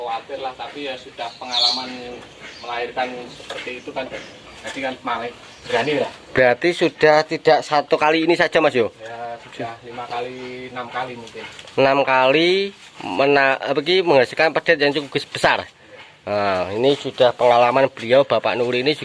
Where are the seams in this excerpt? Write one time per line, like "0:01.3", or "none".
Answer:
none